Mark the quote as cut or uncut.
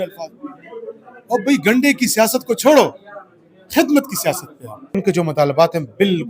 cut